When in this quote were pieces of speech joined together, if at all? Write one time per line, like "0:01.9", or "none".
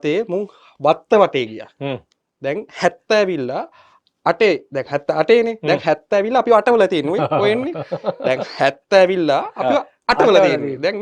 none